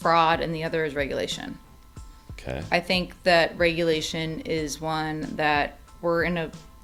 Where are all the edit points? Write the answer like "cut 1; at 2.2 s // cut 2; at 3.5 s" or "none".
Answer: none